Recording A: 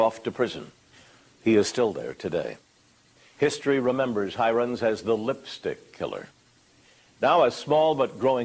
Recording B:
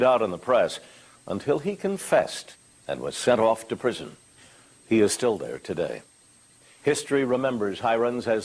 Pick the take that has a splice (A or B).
B